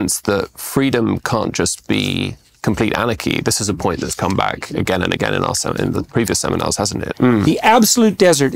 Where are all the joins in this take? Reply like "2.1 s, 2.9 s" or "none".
7.1 s